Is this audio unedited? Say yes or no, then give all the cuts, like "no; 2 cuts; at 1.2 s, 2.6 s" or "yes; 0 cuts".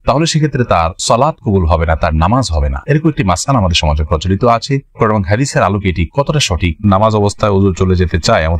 no; 1 cut; at 6.8 s